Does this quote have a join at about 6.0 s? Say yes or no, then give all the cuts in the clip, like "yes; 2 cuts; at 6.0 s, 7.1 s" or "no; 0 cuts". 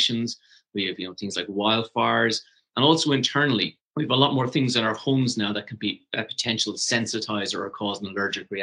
no; 2 cuts; at 2.6 s, 3.8 s